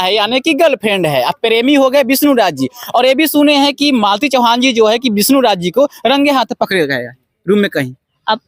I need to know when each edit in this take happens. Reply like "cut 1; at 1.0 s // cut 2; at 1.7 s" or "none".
none